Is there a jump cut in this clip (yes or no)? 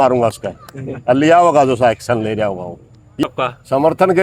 yes